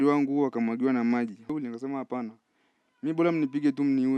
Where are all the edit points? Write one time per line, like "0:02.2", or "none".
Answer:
0:01.5